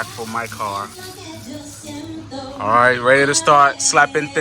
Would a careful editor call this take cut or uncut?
uncut